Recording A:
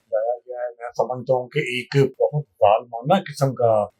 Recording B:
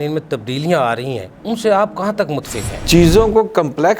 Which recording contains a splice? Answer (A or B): B